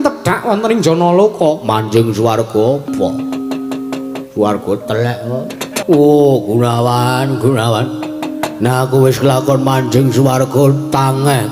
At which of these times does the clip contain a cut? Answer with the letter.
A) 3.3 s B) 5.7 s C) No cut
B